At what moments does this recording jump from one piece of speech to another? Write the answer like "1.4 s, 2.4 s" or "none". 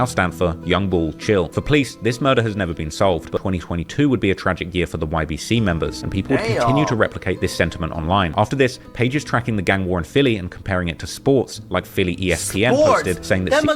3.4 s